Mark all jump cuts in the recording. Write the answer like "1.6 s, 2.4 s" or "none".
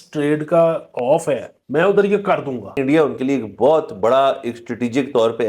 1.5 s, 2.7 s